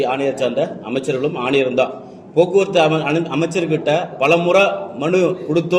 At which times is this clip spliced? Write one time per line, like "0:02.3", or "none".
none